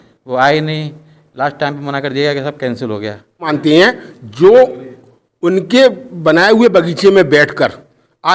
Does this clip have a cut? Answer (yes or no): yes